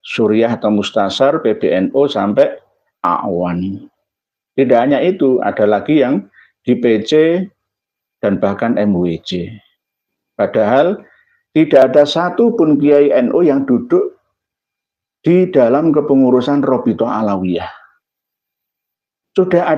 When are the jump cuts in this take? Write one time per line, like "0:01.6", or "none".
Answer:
none